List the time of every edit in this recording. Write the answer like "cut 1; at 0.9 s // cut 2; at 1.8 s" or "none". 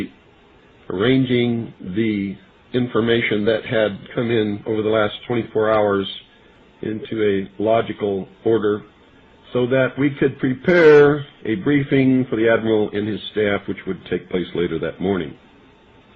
cut 1; at 5.4 s